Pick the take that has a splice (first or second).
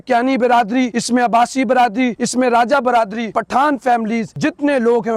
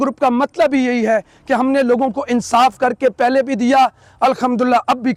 first